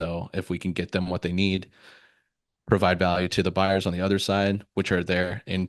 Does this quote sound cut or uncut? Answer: uncut